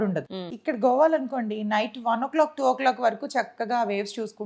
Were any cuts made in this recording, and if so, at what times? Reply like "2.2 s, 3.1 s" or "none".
none